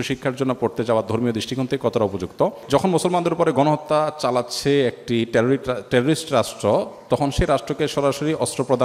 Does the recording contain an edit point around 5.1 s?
no; 1 cut; at 2.6 s

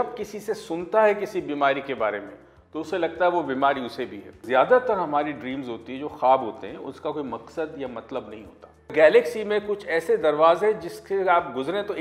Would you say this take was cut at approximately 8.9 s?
yes; 2 cuts; at 4.4 s, 8.9 s

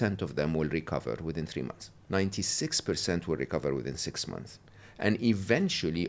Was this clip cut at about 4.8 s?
no; 1 cut; at 2.0 s

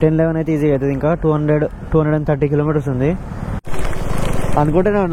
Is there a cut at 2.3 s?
no; 1 cut; at 3.6 s

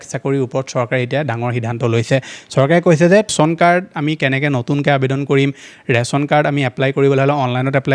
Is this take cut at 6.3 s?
no; 1 cut; at 3.3 s

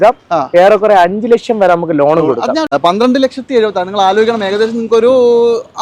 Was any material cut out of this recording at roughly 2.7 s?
yes; 1 cut; at 2.7 s

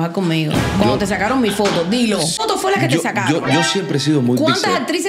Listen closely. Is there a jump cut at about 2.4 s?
yes; 1 cut; at 2.4 s

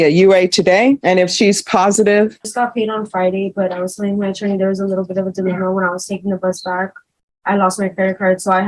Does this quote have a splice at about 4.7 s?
no; 2 cuts; at 1.0 s, 2.5 s

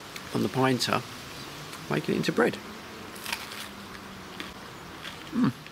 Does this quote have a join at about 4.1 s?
no; 0 cuts

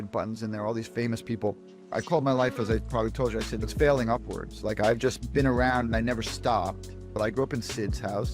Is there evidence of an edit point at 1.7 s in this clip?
yes; 2 cuts; at 1.7 s, 7.1 s

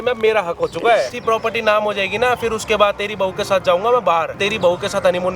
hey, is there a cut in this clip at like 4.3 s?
yes; 2 cuts; at 1.2 s, 4.3 s

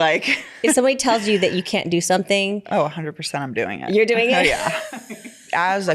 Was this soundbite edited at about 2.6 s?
no; 1 cut; at 4.9 s

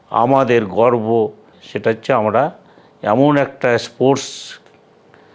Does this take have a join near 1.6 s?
yes; 1 cut; at 1.6 s

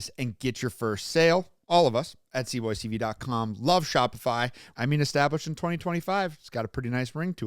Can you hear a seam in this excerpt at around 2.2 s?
no; 1 cut; at 4.6 s

